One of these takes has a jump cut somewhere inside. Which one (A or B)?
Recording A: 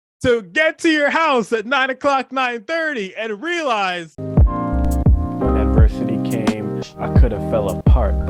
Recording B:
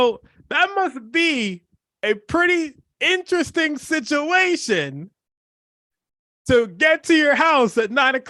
A